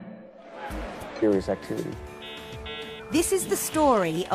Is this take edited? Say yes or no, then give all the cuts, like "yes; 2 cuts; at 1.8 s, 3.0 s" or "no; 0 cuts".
no; 0 cuts